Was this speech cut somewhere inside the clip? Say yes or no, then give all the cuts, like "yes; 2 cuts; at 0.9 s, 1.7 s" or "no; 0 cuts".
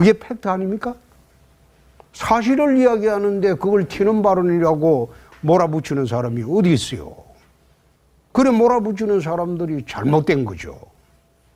no; 0 cuts